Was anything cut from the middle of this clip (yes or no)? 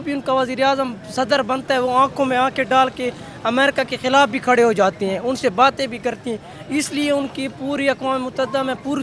no